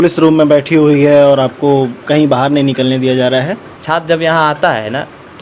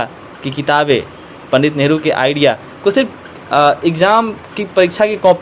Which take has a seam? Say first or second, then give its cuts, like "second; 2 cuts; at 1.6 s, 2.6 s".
first; 1 cut; at 3.7 s